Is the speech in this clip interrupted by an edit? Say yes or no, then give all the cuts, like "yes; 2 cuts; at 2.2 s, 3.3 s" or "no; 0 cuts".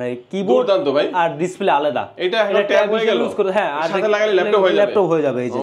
no; 0 cuts